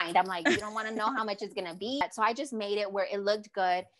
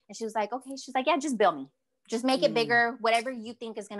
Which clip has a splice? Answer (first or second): first